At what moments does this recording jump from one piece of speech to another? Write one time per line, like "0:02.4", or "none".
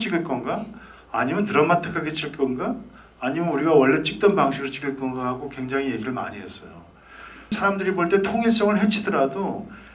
0:07.6